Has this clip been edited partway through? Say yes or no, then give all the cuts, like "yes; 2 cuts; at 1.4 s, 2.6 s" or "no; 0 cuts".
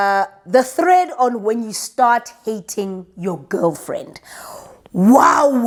no; 0 cuts